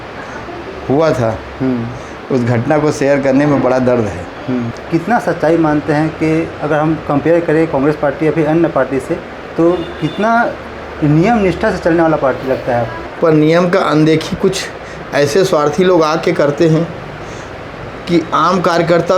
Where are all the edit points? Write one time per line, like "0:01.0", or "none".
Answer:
0:04.8
0:13.0